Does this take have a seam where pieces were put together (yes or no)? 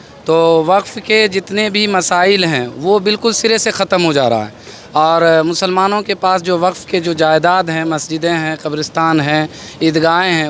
no